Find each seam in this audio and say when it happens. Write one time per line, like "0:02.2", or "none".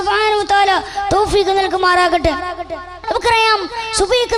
0:02.9